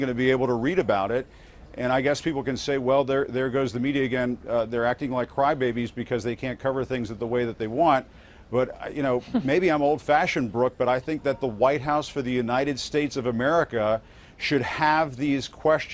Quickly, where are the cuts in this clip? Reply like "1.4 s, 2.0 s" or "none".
none